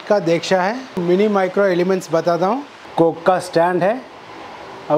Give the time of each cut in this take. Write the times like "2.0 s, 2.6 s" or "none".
0.9 s, 2.8 s